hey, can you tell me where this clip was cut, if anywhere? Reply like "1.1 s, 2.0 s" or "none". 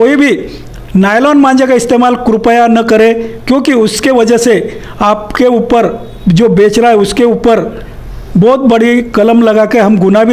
none